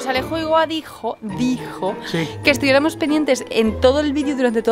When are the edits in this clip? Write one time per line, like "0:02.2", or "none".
none